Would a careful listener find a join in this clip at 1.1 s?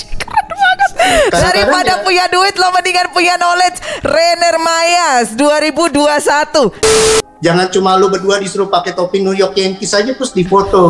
no; 1 cut; at 6.9 s

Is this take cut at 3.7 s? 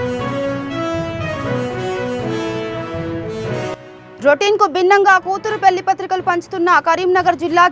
yes; 1 cut; at 3.7 s

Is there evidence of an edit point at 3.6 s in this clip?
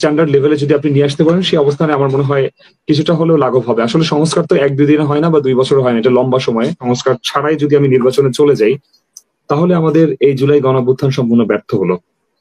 no; 1 cut; at 6.8 s

